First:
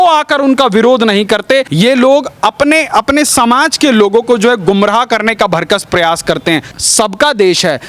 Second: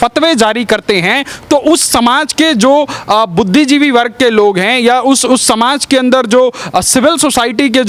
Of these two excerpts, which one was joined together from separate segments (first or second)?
first